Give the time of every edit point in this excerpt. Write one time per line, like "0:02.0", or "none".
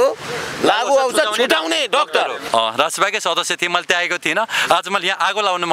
0:02.4